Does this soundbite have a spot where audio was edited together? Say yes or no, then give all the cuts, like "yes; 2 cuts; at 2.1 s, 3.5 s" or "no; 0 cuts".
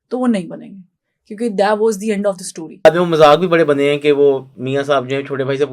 yes; 1 cut; at 2.9 s